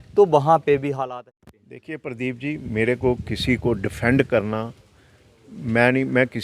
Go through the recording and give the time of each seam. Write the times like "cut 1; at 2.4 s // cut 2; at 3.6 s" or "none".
cut 1; at 1.1 s